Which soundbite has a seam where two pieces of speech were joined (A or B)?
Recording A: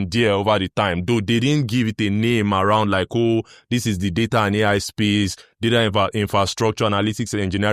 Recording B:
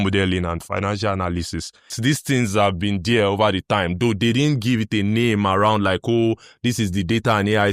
B